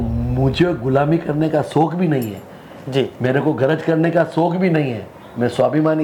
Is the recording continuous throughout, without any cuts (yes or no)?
yes